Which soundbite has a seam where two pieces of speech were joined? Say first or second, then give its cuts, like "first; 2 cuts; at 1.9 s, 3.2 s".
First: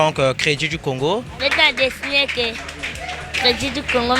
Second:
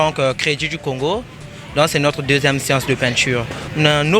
first; 1 cut; at 1.3 s